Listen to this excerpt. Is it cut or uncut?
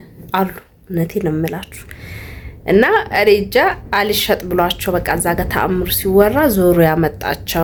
uncut